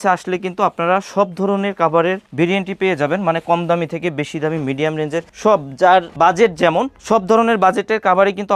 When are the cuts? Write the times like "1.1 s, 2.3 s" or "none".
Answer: none